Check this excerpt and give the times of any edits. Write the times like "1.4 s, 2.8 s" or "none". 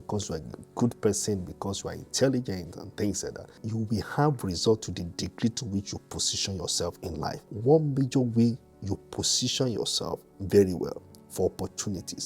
3.6 s, 7.5 s